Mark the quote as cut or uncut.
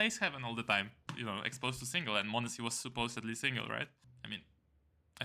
cut